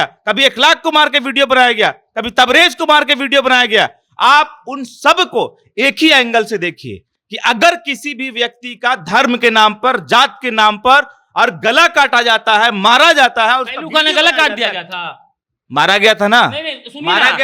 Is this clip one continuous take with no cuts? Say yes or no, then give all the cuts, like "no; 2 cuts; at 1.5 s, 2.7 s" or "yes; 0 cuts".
yes; 0 cuts